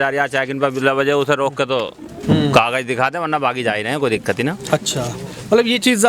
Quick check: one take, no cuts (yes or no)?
yes